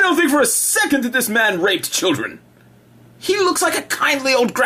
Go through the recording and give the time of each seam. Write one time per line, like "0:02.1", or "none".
0:03.4